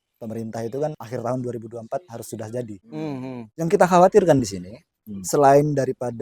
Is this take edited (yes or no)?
yes